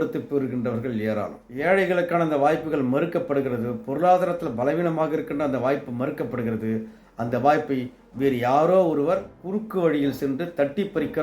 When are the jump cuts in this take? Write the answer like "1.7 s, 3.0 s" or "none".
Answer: 1.5 s